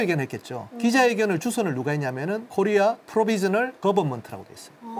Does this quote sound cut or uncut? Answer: uncut